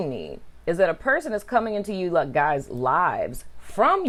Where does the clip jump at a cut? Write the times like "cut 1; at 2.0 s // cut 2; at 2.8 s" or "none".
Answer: none